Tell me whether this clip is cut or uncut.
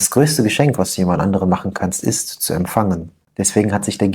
cut